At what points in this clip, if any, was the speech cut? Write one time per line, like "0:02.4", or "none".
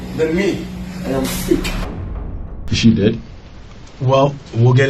0:02.0